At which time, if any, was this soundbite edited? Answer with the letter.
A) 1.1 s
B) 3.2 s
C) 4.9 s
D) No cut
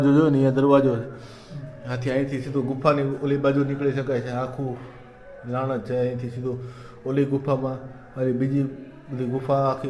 D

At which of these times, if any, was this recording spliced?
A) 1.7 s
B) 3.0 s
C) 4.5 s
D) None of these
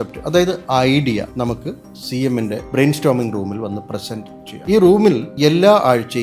C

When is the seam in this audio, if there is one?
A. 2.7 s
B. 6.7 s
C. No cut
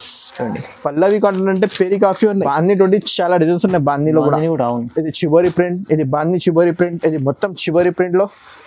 A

